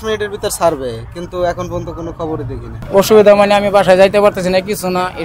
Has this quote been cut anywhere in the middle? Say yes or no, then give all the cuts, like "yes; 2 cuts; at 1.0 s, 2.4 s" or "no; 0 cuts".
yes; 1 cut; at 2.7 s